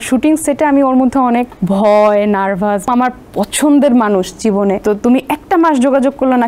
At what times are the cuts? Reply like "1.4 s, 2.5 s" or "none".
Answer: 1.5 s, 2.9 s, 4.8 s